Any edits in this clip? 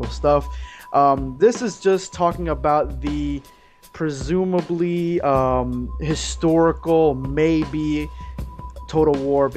no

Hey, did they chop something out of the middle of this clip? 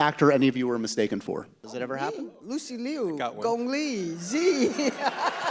yes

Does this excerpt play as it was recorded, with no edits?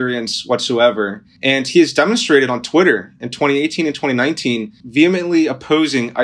no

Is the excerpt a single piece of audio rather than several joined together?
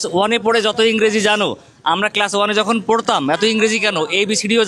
yes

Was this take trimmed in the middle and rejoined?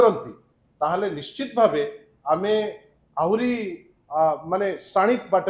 no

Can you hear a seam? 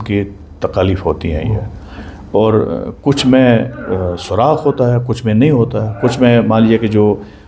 no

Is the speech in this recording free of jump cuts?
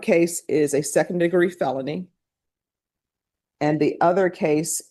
yes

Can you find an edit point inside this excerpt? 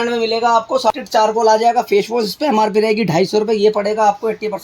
yes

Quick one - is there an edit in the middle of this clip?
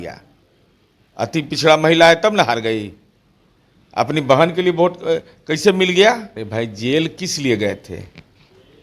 yes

